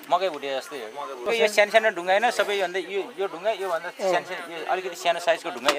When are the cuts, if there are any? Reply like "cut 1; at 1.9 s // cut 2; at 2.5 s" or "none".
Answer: cut 1; at 1.1 s